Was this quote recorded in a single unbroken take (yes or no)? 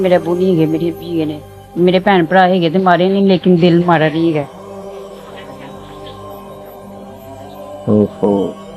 no